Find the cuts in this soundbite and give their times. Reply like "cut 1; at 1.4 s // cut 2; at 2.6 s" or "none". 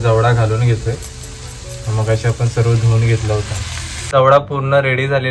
cut 1; at 4.1 s

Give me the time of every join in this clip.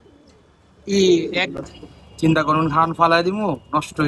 cut 1; at 1.5 s

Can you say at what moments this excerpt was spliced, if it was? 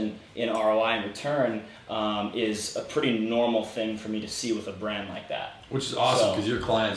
none

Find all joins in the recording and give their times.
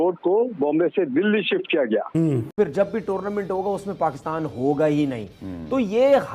cut 1; at 2.5 s

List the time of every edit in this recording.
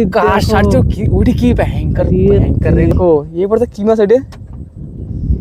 cut 1; at 3.0 s

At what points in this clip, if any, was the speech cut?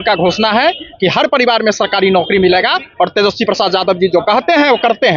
none

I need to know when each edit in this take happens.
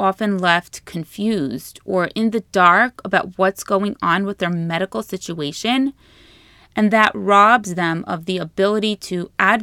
none

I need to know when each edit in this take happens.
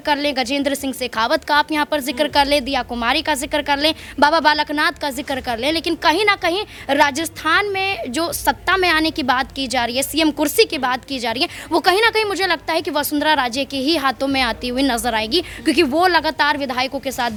none

